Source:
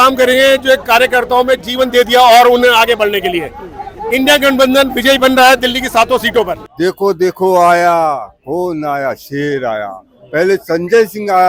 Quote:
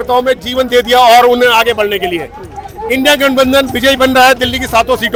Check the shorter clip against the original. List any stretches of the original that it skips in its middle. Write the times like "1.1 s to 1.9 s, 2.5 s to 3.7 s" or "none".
none